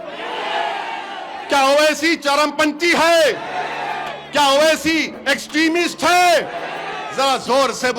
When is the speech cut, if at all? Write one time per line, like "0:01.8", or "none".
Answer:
none